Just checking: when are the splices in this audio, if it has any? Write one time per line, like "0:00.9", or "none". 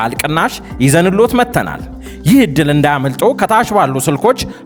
none